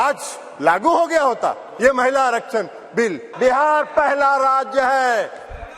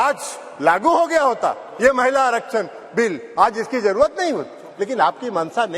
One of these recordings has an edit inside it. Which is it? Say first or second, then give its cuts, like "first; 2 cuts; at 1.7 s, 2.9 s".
first; 1 cut; at 3.2 s